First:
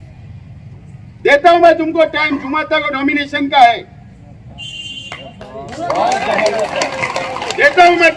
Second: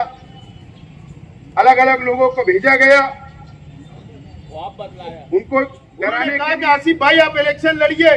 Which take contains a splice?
second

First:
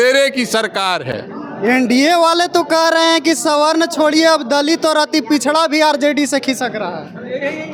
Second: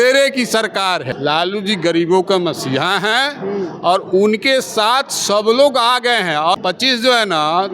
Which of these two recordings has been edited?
second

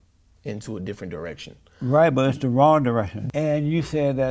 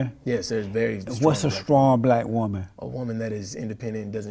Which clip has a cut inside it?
first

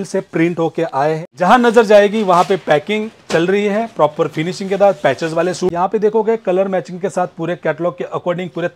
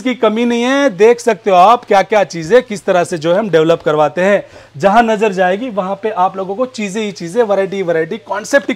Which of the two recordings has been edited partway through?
first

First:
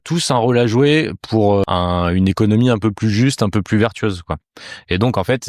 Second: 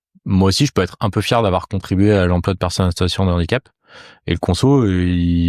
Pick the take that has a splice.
first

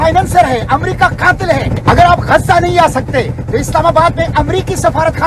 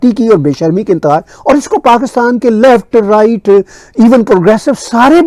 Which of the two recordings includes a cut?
first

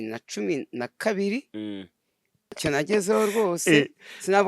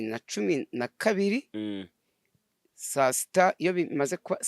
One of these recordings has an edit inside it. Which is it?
first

